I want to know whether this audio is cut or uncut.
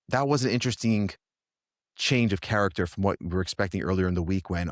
uncut